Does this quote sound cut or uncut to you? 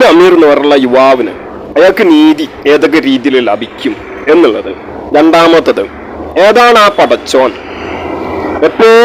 uncut